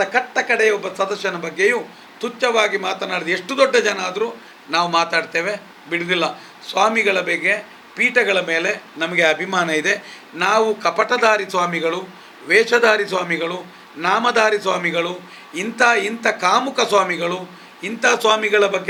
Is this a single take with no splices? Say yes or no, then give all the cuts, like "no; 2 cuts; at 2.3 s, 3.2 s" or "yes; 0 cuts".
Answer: yes; 0 cuts